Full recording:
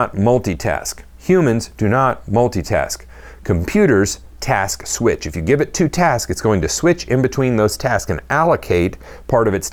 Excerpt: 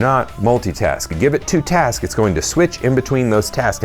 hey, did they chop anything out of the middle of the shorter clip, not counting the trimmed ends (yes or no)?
yes